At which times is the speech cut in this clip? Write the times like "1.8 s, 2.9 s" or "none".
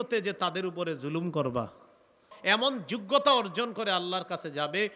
2.3 s